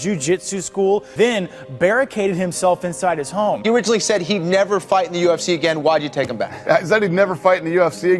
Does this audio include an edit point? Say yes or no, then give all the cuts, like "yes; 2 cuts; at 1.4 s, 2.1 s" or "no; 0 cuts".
yes; 2 cuts; at 1.1 s, 3.6 s